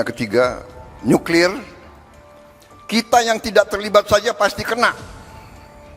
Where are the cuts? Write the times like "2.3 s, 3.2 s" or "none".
5.0 s